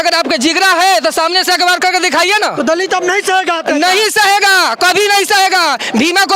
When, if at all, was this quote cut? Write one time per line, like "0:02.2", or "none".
none